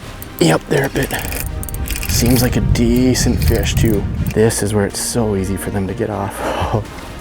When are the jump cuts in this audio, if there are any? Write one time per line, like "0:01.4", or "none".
0:04.2